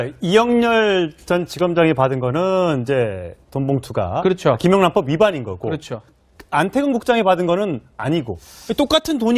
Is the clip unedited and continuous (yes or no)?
no